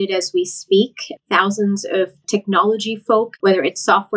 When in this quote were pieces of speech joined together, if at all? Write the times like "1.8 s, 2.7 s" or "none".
2.2 s, 3.3 s